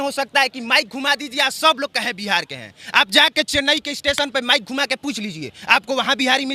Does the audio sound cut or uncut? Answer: uncut